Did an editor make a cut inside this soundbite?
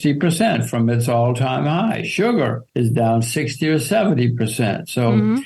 yes; 1 cut; at 2.6 s

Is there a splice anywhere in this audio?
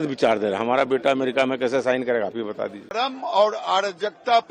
yes; 1 cut; at 3.0 s

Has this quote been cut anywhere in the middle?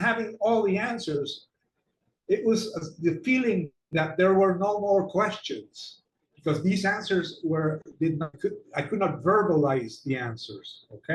yes; 1 cut; at 8.3 s

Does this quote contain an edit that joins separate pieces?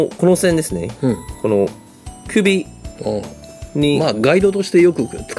no; 0 cuts

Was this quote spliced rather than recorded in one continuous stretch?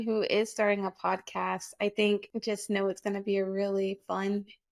yes; 1 cut; at 2.3 s

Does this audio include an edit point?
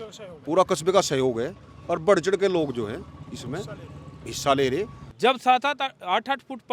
yes; 1 cut; at 5.0 s

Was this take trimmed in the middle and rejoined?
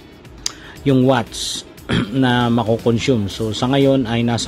no; 0 cuts

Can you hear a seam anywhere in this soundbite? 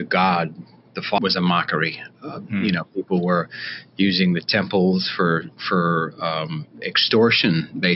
yes; 1 cut; at 1.2 s

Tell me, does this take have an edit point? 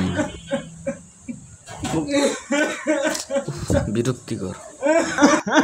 no; 0 cuts

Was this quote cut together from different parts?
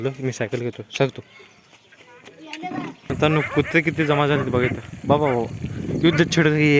yes; 1 cut; at 3.1 s

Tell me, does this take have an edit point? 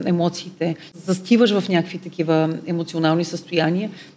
yes; 1 cut; at 0.9 s

